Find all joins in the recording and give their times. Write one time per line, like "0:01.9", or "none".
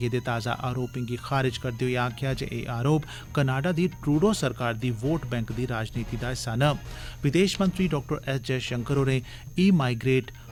none

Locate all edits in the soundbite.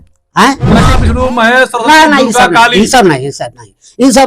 0:01.0

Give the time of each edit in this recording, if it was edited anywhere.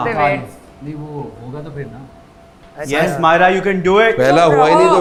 none

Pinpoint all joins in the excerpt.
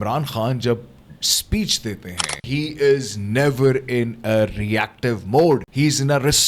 0:02.4
0:05.7

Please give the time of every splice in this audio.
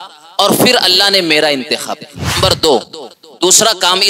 0:02.3

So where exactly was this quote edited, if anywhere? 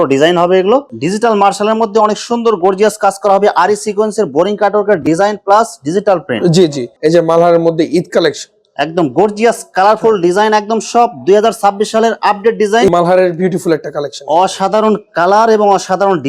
0:00.9
0:06.8
0:12.9

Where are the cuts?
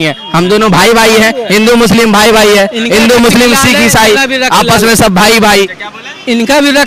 none

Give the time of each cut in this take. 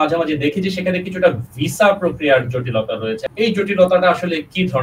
0:03.3

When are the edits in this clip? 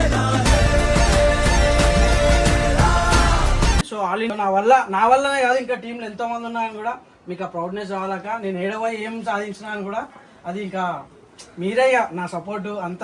0:04.3

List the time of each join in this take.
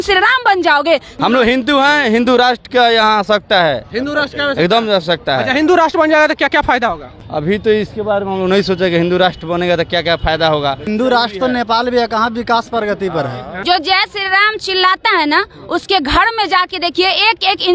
0:01.1
0:07.1
0:10.8
0:13.6

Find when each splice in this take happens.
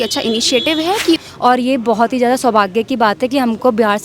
0:01.2

